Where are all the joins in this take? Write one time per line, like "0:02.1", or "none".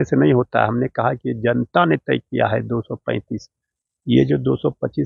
none